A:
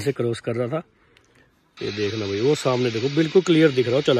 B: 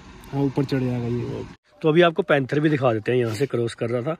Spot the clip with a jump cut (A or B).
B